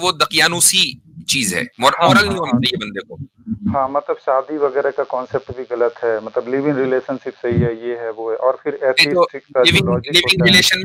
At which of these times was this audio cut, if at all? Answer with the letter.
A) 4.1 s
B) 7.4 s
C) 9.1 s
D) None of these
D